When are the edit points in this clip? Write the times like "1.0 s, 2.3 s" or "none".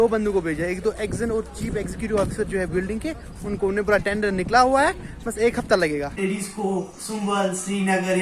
6.2 s